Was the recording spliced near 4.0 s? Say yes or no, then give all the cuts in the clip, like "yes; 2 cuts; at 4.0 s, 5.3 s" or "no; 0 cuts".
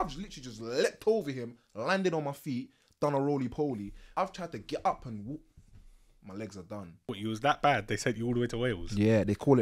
yes; 2 cuts; at 4.0 s, 7.2 s